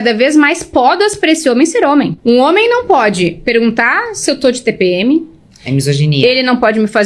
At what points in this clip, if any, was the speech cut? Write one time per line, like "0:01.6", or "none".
0:02.1